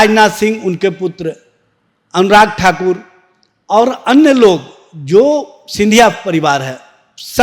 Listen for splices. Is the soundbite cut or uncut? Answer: uncut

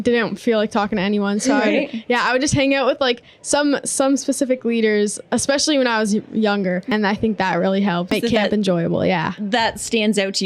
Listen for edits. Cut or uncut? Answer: cut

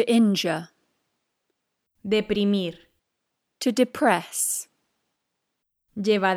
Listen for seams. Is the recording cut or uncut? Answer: uncut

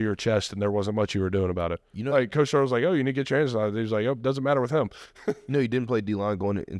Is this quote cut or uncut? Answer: uncut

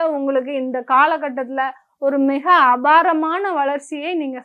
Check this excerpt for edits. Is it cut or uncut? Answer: uncut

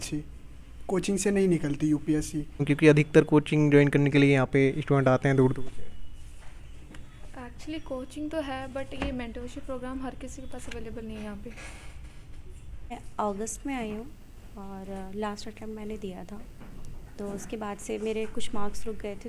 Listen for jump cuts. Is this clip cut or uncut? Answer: cut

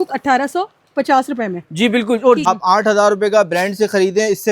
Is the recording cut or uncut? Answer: cut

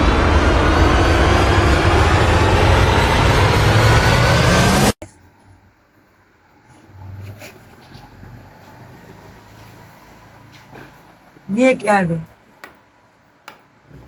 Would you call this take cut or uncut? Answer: uncut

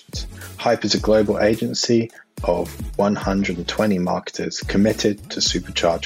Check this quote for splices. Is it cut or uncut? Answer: uncut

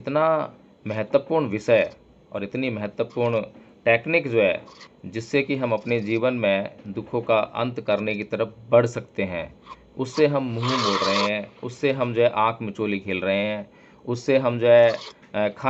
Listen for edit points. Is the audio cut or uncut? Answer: uncut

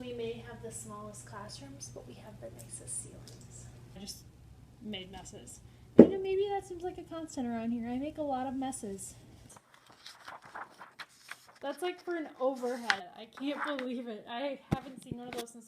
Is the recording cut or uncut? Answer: cut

